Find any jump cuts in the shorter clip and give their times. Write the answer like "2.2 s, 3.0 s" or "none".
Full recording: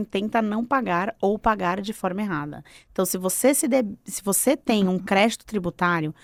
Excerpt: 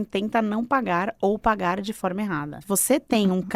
2.5 s